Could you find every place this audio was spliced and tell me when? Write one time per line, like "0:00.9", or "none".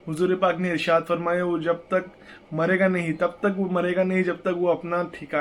none